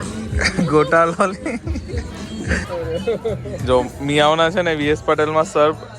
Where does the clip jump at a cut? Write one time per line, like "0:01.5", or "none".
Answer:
0:02.7